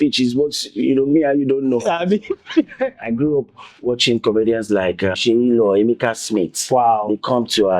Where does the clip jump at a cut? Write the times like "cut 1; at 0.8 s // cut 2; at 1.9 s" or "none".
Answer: cut 1; at 3.0 s // cut 2; at 5.2 s